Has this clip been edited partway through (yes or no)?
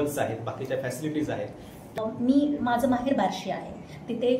yes